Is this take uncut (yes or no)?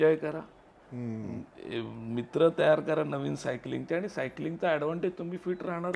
yes